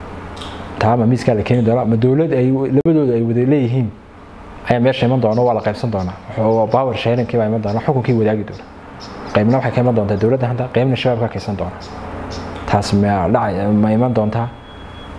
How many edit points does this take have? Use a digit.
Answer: 0